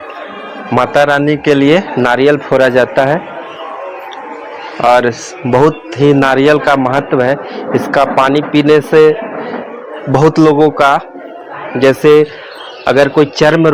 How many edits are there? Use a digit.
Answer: 0